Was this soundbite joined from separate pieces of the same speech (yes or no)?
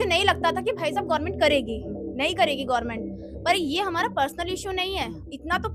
no